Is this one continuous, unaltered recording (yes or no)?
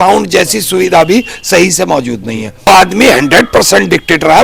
no